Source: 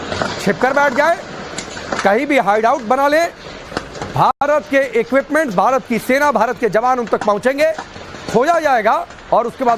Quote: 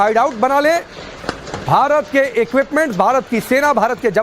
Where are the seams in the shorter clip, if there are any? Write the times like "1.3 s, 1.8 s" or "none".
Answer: 1.8 s